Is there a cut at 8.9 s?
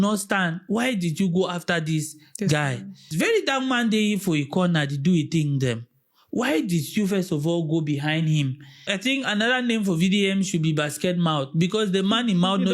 yes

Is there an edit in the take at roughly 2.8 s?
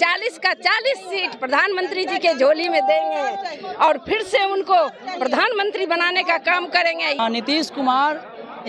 no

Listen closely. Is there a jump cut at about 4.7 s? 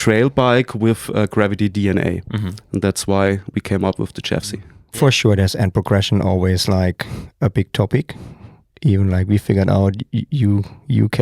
yes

